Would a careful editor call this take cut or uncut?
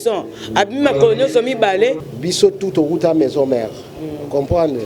cut